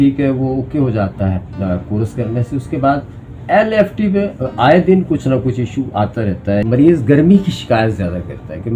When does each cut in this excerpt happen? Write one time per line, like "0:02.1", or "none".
0:06.6

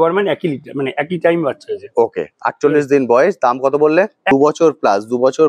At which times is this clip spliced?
0:04.2

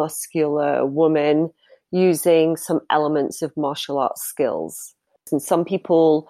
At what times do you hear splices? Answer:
0:05.3

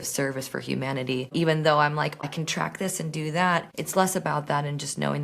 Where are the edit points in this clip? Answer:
0:01.3
0:02.2
0:03.8

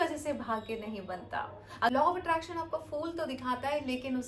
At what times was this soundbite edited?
0:01.9

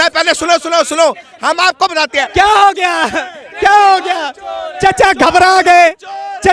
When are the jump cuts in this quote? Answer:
0:02.2

